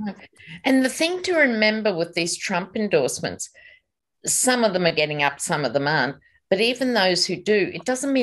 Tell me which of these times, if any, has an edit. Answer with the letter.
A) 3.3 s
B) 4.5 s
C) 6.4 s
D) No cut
D